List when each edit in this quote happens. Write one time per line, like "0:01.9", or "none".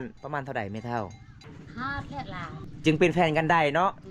0:01.5
0:02.6